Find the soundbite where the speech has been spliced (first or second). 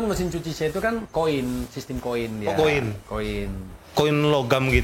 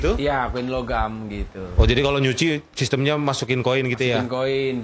first